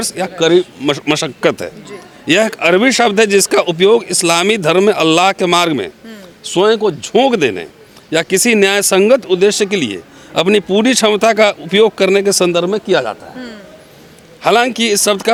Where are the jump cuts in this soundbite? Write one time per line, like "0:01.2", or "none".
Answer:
none